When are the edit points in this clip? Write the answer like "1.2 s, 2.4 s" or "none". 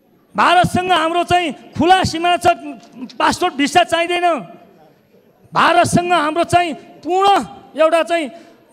none